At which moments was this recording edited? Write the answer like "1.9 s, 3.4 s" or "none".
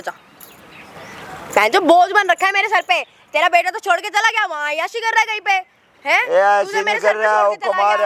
none